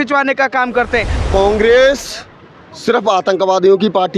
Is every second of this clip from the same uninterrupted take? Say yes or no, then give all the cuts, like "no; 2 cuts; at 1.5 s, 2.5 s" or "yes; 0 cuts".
no; 1 cut; at 1.1 s